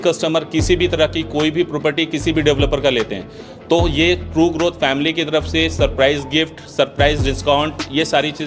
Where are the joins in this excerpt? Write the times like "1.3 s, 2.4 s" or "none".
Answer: none